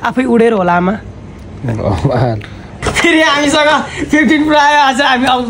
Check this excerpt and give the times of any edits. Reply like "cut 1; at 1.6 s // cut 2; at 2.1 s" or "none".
cut 1; at 2.8 s